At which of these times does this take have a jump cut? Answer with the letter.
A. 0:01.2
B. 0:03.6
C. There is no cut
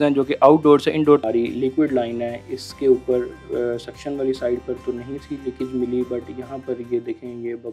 A